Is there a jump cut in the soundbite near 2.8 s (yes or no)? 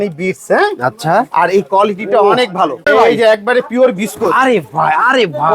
yes